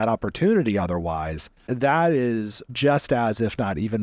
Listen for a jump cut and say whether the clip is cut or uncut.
cut